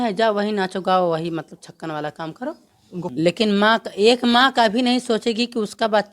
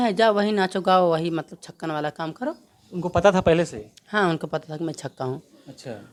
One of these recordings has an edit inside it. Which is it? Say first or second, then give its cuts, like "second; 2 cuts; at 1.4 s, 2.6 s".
first; 1 cut; at 3.1 s